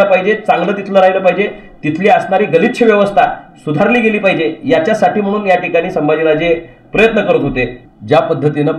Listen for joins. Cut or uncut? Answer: cut